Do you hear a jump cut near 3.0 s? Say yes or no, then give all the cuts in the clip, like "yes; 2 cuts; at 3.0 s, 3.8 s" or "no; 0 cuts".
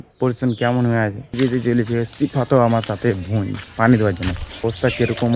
no; 2 cuts; at 1.4 s, 4.6 s